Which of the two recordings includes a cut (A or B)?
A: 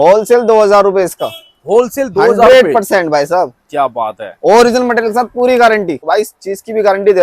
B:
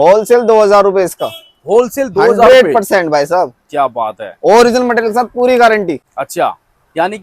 A